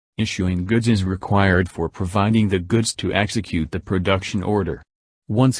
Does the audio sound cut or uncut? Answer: uncut